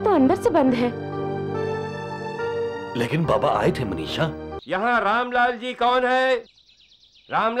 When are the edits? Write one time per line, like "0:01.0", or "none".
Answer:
0:04.5